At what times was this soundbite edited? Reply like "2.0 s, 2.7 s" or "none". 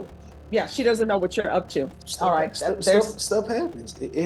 2.0 s